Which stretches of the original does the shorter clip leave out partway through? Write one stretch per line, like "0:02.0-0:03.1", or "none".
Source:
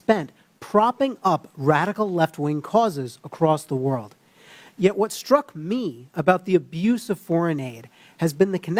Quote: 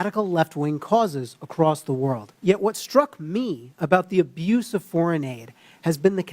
0:04.1-0:04.6